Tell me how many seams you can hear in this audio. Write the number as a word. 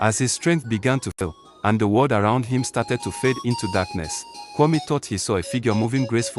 one